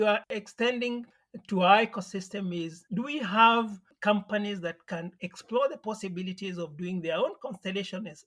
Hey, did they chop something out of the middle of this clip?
no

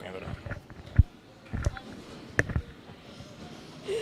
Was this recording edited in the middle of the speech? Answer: no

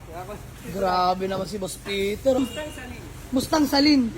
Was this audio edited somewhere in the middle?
yes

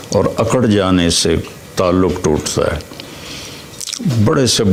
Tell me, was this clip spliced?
no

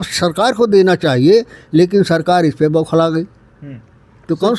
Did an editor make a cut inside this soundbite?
no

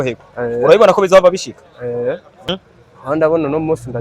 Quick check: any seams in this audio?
yes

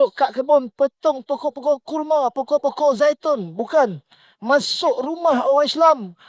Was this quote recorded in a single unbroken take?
yes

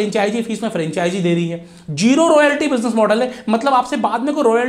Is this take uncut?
yes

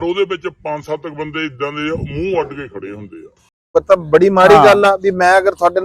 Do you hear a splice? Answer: yes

